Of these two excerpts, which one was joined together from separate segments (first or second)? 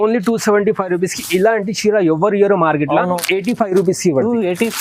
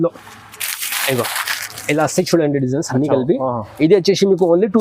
first